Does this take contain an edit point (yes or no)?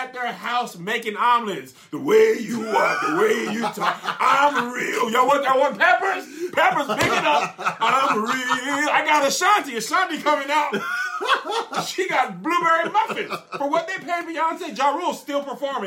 no